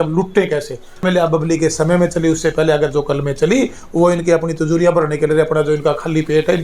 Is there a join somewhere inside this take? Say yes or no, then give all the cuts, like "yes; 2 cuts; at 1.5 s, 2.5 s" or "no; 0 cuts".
yes; 1 cut; at 1.0 s